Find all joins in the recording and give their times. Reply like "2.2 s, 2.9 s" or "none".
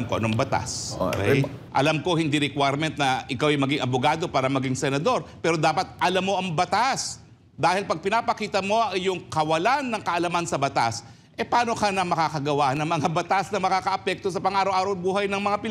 1.6 s

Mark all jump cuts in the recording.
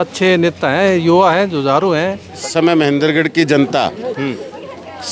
2.5 s

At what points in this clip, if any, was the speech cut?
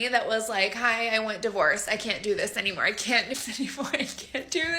3.3 s

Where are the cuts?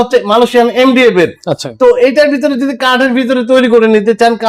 none

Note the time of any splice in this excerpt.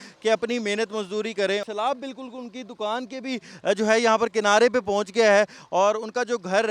1.6 s

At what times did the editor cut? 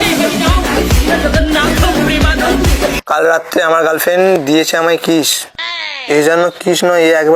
3.0 s

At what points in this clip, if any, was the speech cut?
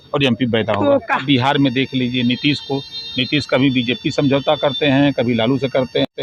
1.2 s

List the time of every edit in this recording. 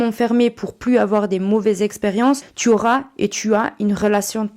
2.5 s

